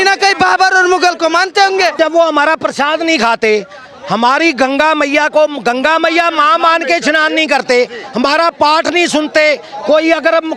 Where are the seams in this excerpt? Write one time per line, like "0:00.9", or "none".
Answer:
0:02.0